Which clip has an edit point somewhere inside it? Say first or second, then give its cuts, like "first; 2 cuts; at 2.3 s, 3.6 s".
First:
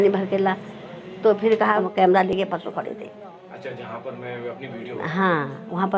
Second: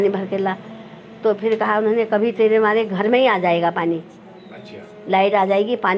first; 1 cut; at 1.8 s